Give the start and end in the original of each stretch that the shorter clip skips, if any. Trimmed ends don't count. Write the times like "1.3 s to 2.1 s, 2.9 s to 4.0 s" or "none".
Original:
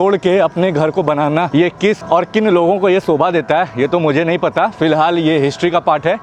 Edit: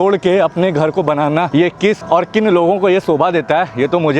none